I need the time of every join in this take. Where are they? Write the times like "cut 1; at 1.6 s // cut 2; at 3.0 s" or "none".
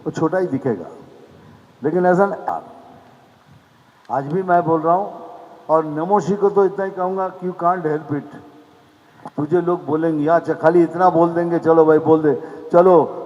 cut 1; at 2.5 s